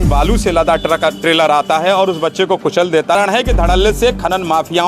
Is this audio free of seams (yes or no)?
no